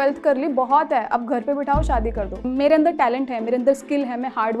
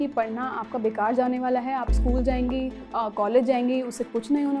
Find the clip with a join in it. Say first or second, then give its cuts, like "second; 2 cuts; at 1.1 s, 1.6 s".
first; 1 cut; at 2.4 s